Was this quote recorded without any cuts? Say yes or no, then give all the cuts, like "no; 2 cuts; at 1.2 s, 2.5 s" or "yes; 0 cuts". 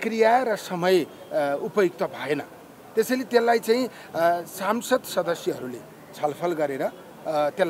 yes; 0 cuts